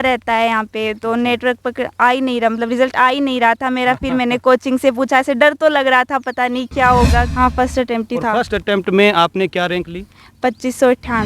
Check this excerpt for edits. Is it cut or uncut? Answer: cut